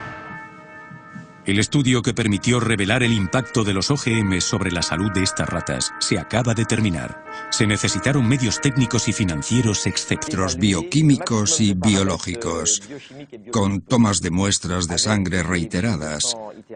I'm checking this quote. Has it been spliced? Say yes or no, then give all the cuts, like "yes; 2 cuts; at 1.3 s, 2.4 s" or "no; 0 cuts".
no; 0 cuts